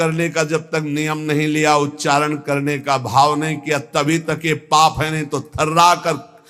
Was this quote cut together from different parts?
no; 0 cuts

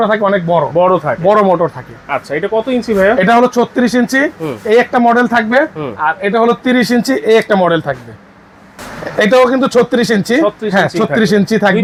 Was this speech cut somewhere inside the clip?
no; 0 cuts

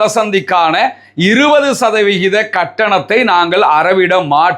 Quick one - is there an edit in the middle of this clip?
no; 0 cuts

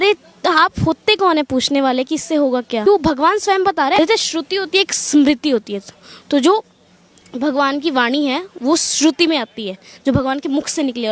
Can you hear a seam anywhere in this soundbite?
yes; 2 cuts; at 2.8 s, 4.0 s

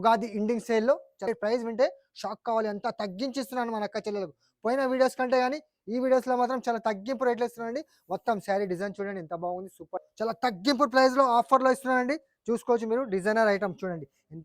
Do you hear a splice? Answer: yes; 2 cuts; at 1.3 s, 10.1 s

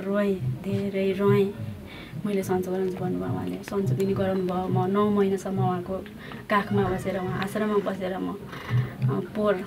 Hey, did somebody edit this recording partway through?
no; 0 cuts

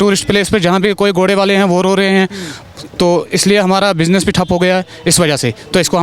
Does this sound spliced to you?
no; 0 cuts

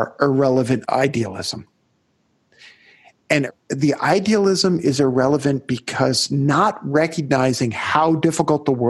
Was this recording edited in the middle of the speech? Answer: yes; 2 cuts; at 0.8 s, 3.5 s

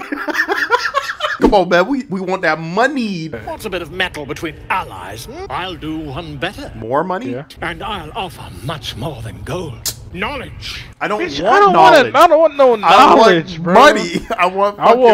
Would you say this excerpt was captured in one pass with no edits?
no; 4 cuts; at 1.4 s, 3.5 s, 5.4 s, 7.5 s

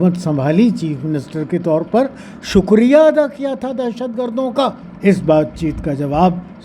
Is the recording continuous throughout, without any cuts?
no; 1 cut; at 4.9 s

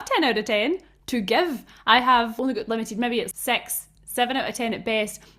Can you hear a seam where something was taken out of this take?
no; 0 cuts

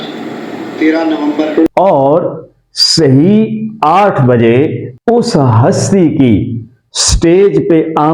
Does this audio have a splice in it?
yes; 1 cut; at 1.7 s

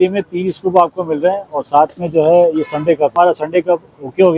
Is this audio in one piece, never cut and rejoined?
no; 1 cut; at 3.1 s

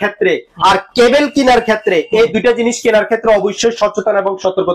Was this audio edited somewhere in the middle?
no; 0 cuts

